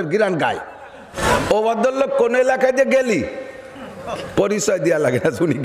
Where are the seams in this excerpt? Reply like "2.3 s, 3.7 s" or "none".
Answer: 1.1 s